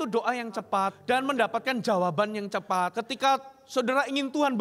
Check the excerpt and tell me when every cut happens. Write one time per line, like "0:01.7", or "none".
0:01.0
0:03.0

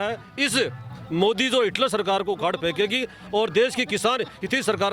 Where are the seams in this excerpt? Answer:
none

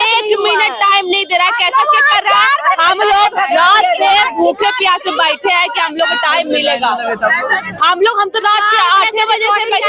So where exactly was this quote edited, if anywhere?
none

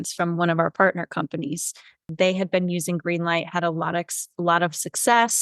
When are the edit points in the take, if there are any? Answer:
0:02.1

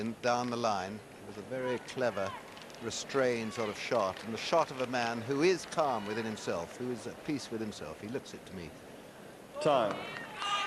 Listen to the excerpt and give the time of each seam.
0:03.9

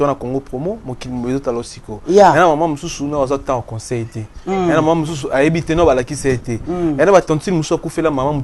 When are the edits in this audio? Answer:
none

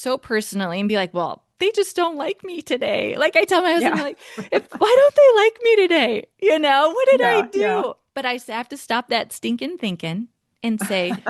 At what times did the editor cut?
none

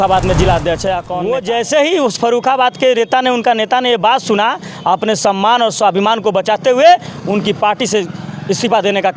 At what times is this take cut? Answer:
0:01.1

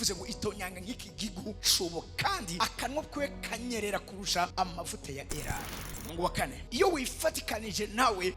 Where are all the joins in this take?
0:06.7

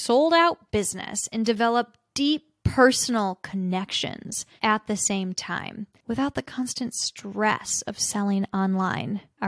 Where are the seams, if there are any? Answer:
none

